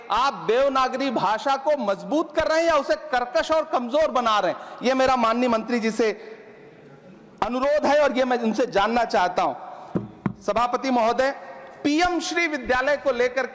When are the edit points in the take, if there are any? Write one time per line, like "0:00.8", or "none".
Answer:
none